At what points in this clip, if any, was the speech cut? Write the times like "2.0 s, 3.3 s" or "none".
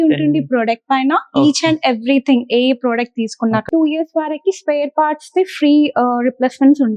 3.6 s